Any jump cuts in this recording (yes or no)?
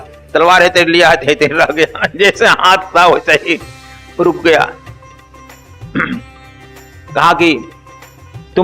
no